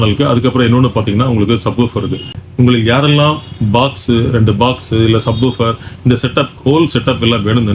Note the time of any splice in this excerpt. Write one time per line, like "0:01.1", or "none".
0:02.3